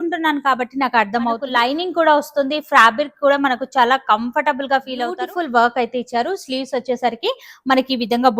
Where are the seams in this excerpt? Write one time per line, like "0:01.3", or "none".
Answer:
0:01.5
0:05.1